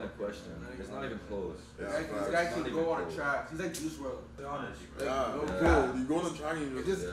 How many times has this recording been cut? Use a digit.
2